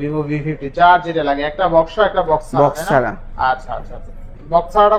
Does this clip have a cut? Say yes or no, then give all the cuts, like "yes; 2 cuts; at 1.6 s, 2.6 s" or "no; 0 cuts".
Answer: no; 0 cuts